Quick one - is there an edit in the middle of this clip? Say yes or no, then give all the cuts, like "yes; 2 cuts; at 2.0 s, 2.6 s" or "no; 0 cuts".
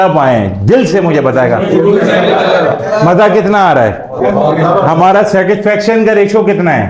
no; 0 cuts